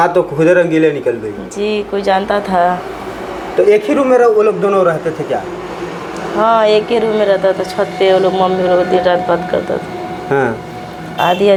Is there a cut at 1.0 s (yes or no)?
no